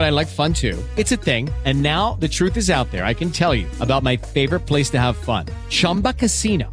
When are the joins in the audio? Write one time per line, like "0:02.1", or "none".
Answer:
none

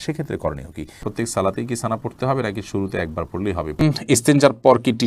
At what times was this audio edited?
0:01.1
0:03.8

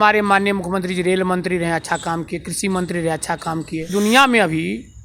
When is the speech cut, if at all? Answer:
0:03.9

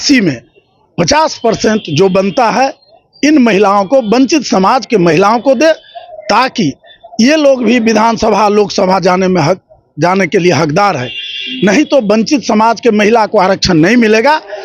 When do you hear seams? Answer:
none

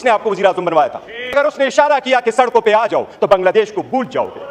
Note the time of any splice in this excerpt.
0:01.3

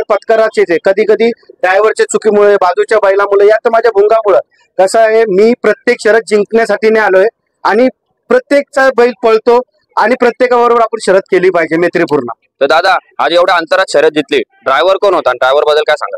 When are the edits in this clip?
none

